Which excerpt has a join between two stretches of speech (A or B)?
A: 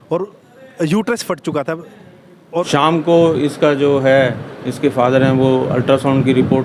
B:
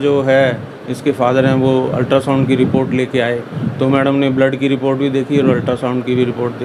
A